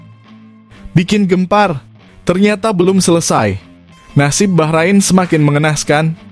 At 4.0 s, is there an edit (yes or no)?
no